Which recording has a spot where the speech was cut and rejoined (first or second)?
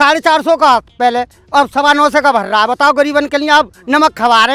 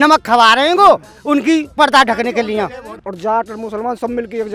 second